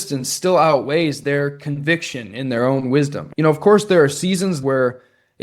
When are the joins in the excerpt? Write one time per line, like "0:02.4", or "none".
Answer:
0:03.2
0:04.6